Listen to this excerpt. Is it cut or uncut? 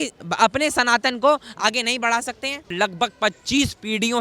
cut